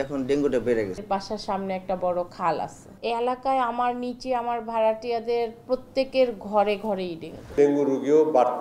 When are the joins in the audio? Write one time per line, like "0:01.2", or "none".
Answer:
0:01.0
0:07.5